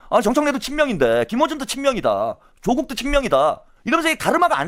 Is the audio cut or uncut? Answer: uncut